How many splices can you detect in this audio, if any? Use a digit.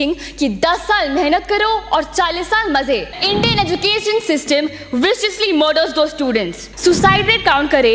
2